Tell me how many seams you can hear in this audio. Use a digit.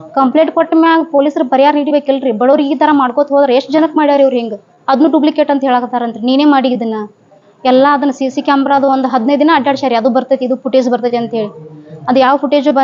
0